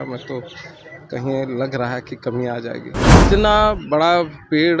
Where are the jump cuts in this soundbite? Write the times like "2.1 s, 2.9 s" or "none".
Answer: 3.2 s